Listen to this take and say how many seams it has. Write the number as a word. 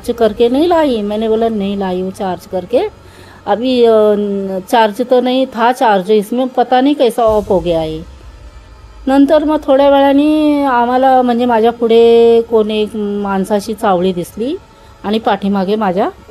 zero